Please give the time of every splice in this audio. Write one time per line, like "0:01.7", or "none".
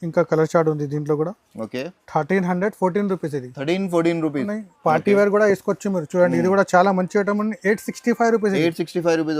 0:04.5